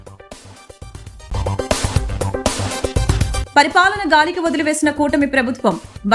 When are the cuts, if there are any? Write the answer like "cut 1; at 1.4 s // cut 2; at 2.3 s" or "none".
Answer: none